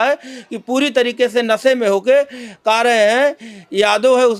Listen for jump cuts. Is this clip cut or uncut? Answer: uncut